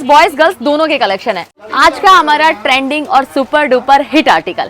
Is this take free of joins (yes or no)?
no